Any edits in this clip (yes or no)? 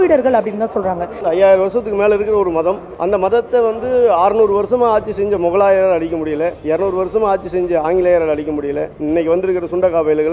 yes